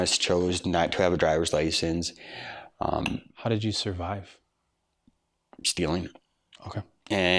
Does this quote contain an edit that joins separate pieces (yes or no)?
no